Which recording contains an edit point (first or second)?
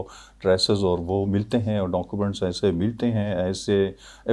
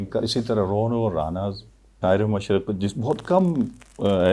second